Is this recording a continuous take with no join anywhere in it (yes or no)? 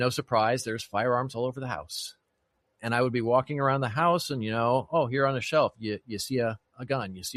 yes